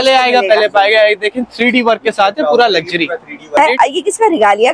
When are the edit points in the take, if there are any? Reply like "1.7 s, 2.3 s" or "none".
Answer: 3.6 s